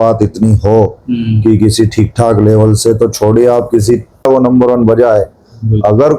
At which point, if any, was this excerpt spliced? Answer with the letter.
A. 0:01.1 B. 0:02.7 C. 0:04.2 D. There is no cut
C